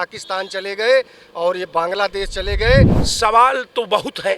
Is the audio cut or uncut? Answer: cut